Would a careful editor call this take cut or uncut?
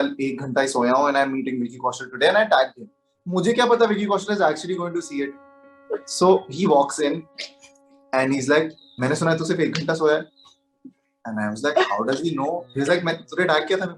uncut